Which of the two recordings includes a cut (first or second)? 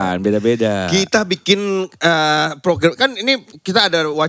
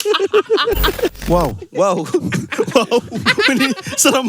second